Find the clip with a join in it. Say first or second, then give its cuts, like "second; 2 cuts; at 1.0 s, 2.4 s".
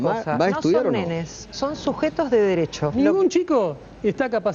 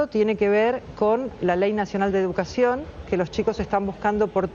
first; 1 cut; at 2.9 s